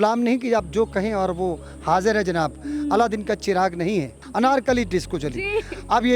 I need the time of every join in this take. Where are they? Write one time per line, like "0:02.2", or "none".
0:04.2